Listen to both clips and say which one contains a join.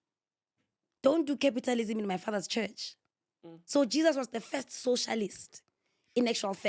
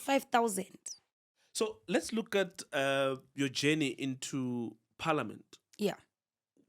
second; 1 cut; at 1.5 s

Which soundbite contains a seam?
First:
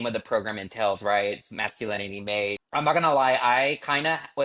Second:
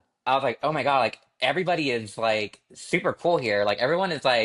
first; 1 cut; at 2.6 s

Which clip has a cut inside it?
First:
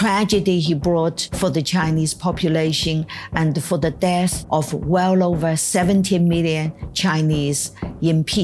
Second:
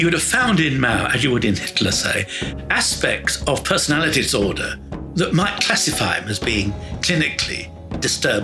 first; 2 cuts; at 1.2 s, 4.4 s

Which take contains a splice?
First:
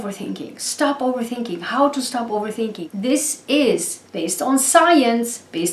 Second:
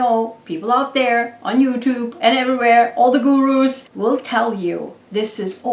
first; 1 cut; at 2.8 s

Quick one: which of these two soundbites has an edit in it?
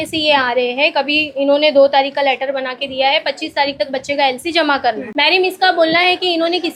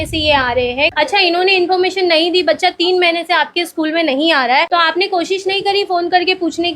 second; 1 cut; at 0.9 s

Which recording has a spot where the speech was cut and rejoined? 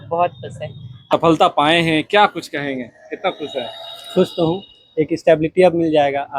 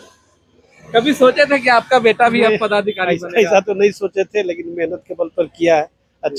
first; 1 cut; at 1.2 s

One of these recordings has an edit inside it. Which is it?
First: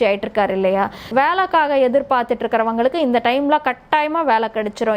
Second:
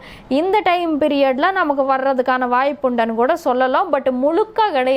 first; 1 cut; at 1.1 s

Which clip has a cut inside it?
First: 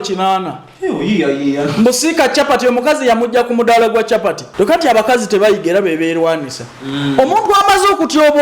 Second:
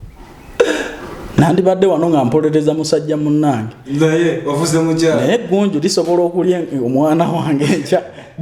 first; 1 cut; at 4.4 s

